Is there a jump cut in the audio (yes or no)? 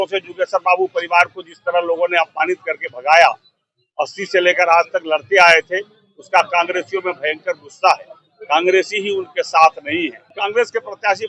yes